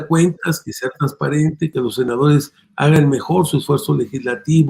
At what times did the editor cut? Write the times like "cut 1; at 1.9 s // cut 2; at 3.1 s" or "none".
cut 1; at 1.7 s